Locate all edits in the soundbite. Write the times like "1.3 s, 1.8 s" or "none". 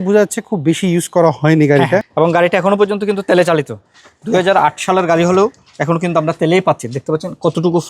2.1 s

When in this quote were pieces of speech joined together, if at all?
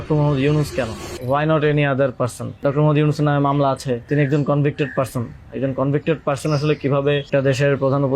1.1 s, 2.6 s, 4.1 s, 7.3 s

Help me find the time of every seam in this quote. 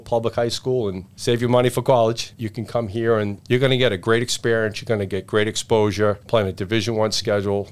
1.1 s, 3.4 s, 6.2 s

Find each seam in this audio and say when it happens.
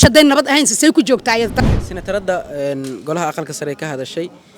1.5 s

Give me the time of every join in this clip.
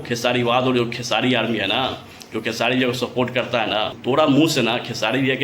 3.9 s

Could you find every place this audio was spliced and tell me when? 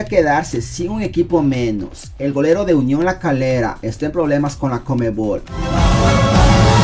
5.4 s

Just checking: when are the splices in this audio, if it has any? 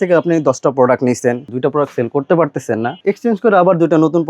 1.5 s, 3.0 s

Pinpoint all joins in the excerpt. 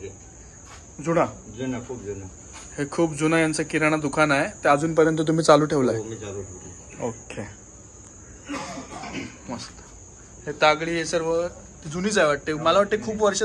none

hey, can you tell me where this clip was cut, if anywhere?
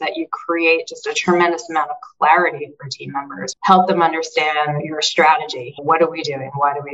none

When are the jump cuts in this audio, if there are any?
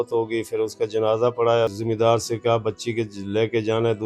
1.8 s

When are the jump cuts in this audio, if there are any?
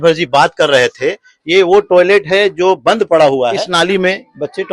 3.6 s

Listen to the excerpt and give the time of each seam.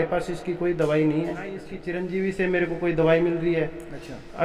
1.8 s

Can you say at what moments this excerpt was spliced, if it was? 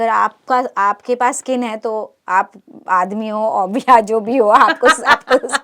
none

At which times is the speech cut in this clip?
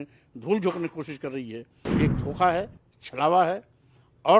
1.8 s

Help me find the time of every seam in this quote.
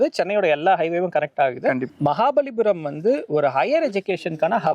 1.9 s

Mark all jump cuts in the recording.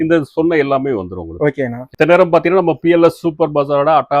1.9 s

